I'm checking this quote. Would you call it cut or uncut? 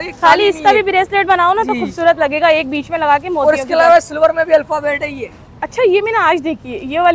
uncut